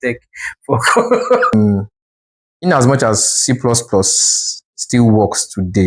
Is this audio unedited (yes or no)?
no